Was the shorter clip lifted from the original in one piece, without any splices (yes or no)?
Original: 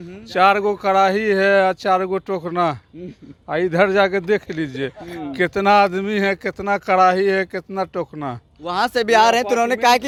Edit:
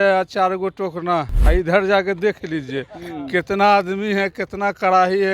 no